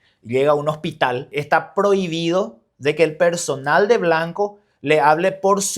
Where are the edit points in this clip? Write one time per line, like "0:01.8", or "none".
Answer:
0:01.3

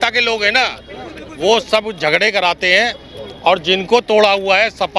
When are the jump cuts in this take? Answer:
none

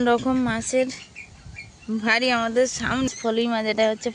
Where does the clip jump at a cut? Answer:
0:03.1

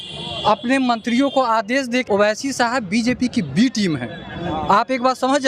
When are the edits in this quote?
0:02.0

